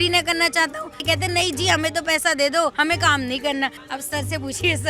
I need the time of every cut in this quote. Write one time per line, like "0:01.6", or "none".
0:01.0
0:02.8
0:03.8